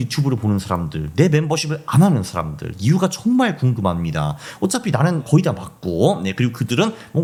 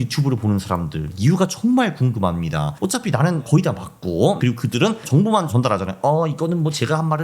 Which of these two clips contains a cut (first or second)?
second